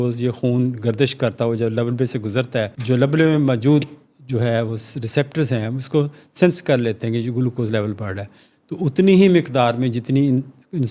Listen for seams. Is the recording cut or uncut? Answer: cut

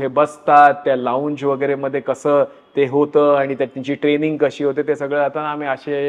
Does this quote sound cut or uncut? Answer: uncut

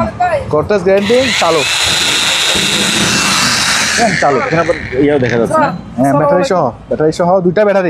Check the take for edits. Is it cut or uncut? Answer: uncut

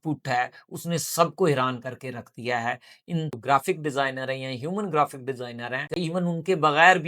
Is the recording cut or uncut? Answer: cut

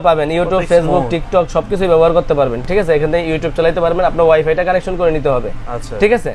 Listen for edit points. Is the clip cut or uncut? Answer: uncut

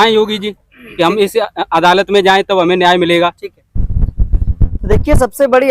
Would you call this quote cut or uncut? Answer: uncut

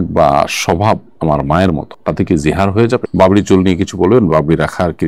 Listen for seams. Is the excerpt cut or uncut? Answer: cut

